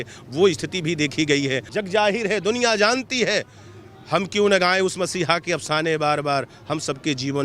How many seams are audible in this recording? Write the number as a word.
one